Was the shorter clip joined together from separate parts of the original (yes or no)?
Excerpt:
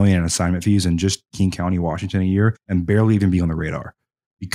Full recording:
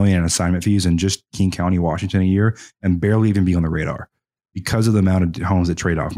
yes